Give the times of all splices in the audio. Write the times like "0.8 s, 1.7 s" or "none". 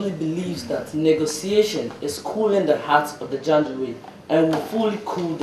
none